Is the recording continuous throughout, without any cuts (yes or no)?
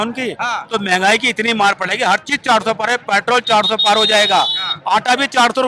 yes